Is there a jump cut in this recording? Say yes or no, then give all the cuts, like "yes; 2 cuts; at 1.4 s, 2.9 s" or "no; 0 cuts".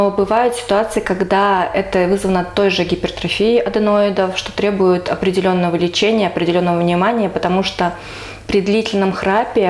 no; 0 cuts